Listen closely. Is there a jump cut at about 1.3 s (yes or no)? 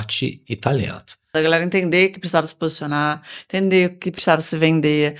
yes